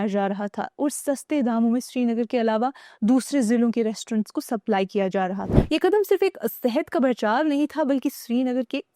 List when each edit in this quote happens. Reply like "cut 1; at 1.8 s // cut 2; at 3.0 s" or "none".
cut 1; at 5.5 s